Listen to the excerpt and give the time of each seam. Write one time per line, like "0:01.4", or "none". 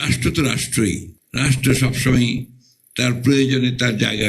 0:01.2